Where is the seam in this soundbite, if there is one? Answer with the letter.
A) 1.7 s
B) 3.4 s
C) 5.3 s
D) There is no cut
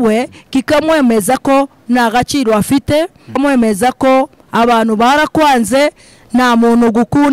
B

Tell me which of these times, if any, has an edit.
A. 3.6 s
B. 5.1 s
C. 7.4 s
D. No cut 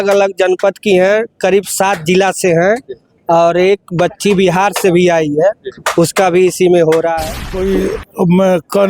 C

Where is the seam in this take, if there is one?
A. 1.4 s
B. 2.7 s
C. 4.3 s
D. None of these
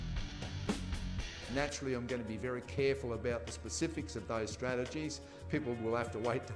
A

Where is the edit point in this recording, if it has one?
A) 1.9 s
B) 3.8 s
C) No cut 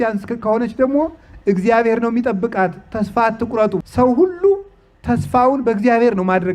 B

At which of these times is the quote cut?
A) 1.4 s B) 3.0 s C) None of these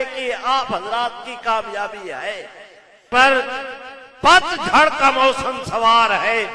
B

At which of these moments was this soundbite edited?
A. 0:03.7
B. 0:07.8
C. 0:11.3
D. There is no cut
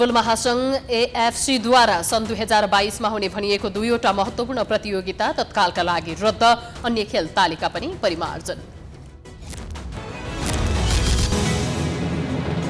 C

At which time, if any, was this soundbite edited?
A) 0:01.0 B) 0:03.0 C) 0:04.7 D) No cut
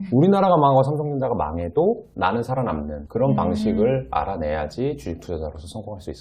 B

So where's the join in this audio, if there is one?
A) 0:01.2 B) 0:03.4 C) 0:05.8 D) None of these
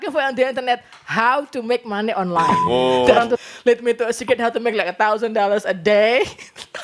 B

